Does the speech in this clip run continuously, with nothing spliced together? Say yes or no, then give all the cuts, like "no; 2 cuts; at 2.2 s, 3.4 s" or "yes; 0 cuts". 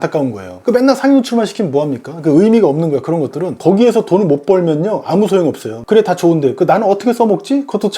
no; 2 cuts; at 3.5 s, 5.7 s